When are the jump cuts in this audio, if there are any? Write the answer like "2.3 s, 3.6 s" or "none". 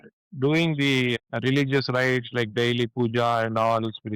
1.2 s